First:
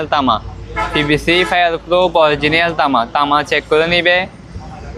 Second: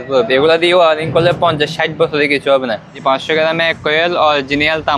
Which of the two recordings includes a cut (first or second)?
second